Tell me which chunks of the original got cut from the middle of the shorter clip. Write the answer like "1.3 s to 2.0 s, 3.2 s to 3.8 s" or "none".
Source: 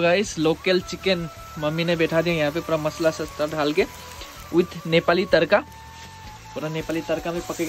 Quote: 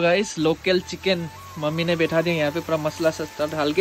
none